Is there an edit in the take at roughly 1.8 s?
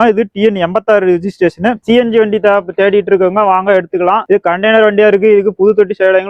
yes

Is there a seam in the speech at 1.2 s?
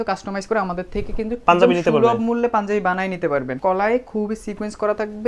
no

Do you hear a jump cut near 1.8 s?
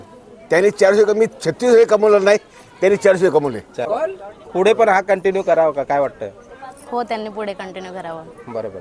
no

